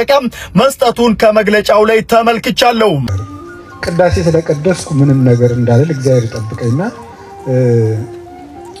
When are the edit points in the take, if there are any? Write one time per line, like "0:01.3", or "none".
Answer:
0:03.0